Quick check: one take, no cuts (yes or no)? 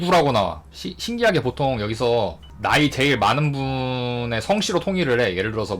no